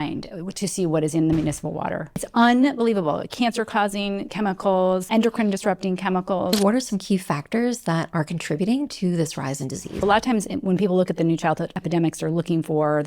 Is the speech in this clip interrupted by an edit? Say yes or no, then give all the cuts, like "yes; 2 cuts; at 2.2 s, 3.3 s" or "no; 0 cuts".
yes; 5 cuts; at 2.2 s, 5.1 s, 6.5 s, 10.0 s, 11.7 s